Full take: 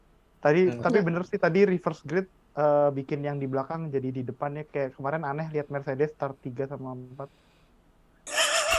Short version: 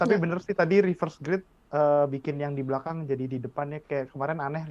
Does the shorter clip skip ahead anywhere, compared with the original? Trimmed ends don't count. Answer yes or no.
no